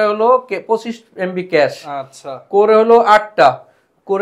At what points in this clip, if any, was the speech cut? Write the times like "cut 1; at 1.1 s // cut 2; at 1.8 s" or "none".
none